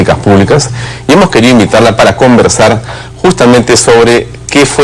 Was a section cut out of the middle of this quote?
no; 0 cuts

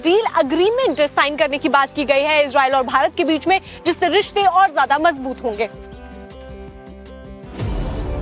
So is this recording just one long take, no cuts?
yes; 0 cuts

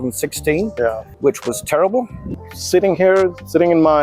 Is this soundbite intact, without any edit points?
no; 2 cuts; at 1.1 s, 2.3 s

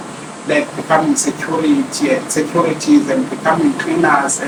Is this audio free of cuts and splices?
yes; 0 cuts

